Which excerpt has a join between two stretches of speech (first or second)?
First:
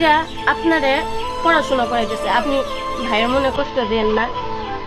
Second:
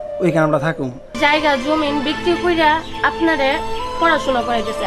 second